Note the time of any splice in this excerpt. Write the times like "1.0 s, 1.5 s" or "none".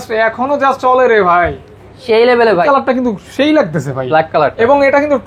2.6 s